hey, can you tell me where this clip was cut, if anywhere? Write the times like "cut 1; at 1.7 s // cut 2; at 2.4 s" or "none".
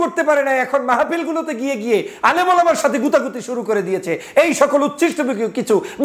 none